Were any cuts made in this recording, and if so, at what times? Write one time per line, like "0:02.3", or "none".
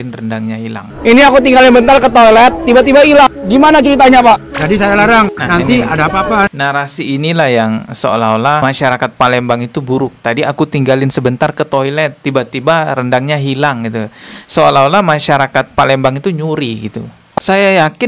0:00.9
0:17.4

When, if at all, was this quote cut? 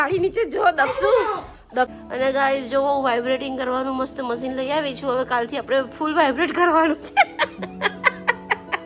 0:01.9

